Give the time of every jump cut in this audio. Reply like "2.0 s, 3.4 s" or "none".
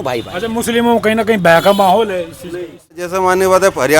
2.9 s